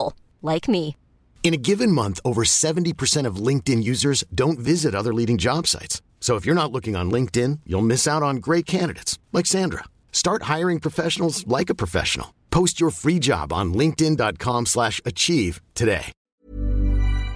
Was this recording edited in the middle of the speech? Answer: yes; 1 cut; at 16.2 s

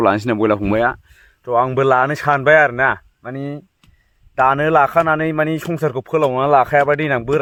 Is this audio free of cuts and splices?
yes; 0 cuts

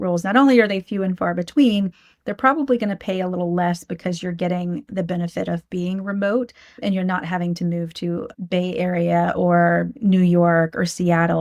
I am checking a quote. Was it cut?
yes; 2 cuts; at 6.7 s, 8.3 s

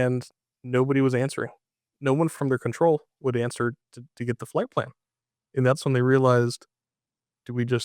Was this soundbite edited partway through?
yes; 1 cut; at 2.3 s

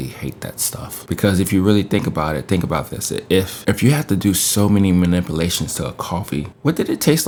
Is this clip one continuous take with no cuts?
yes; 0 cuts

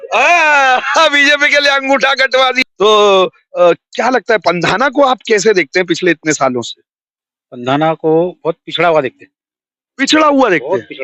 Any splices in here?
yes; 1 cut; at 2.6 s

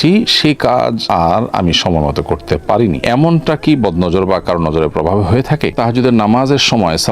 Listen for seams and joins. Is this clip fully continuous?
no; 1 cut; at 5.7 s

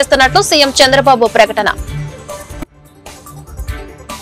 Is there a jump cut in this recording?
no; 0 cuts

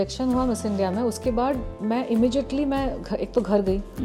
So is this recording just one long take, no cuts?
yes; 0 cuts

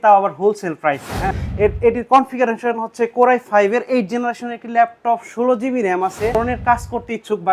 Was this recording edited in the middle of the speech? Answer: yes; 2 cuts; at 1.2 s, 6.3 s

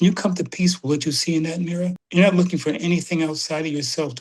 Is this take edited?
yes; 1 cut; at 2.0 s

